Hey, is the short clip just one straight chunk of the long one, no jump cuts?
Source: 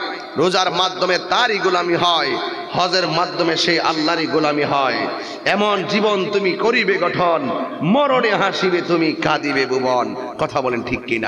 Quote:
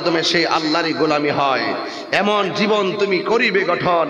yes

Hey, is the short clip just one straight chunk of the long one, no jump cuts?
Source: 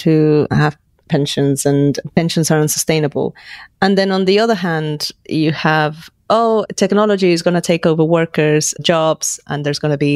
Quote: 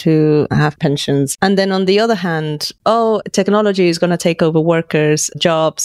no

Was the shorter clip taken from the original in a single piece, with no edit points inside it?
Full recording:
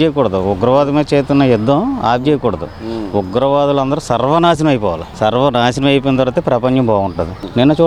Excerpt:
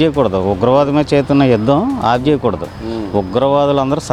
yes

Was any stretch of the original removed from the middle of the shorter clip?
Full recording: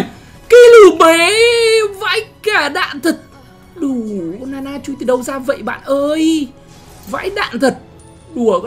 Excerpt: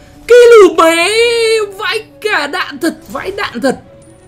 yes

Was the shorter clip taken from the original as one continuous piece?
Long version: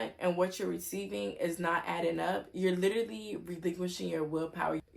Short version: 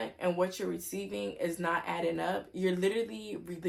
yes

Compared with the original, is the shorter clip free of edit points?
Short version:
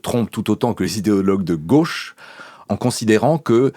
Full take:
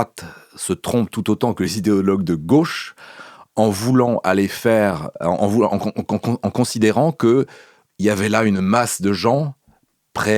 no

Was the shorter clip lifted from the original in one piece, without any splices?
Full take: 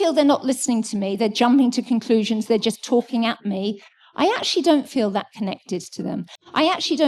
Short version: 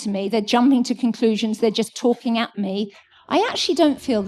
yes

